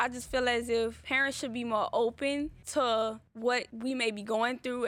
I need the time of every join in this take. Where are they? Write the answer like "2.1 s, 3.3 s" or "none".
1.1 s, 2.6 s, 3.6 s